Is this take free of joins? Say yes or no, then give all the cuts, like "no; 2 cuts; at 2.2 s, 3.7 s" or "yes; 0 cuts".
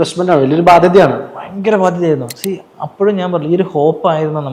yes; 0 cuts